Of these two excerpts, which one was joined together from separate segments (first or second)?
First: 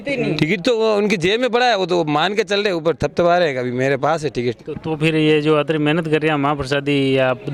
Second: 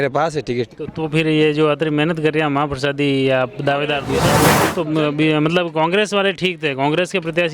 second